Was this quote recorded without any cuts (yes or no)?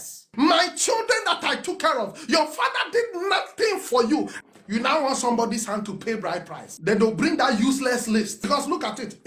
no